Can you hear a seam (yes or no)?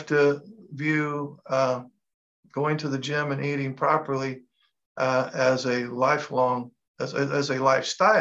no